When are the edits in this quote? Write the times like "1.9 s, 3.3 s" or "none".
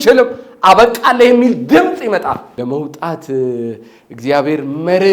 2.5 s